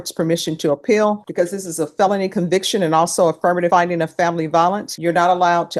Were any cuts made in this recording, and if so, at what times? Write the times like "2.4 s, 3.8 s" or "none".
1.2 s, 3.7 s, 4.9 s